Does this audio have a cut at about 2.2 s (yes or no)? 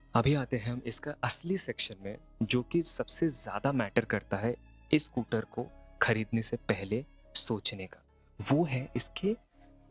no